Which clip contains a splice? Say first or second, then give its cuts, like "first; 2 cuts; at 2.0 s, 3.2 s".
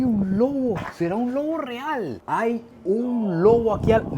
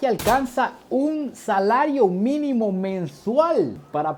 first; 1 cut; at 2.2 s